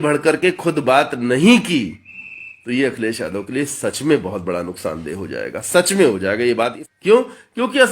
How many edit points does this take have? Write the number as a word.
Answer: one